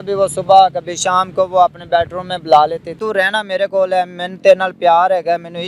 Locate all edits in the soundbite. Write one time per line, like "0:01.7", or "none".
0:02.9